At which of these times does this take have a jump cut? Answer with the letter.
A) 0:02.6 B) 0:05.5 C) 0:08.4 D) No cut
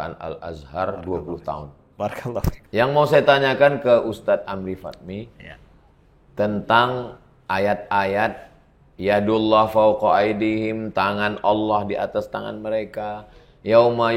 A